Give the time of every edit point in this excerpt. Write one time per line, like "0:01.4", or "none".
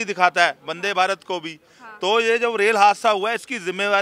none